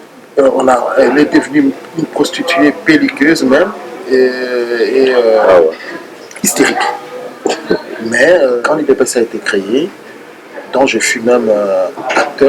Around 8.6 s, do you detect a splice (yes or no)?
yes